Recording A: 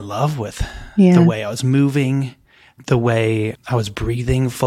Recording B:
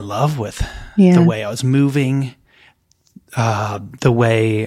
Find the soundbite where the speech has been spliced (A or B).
A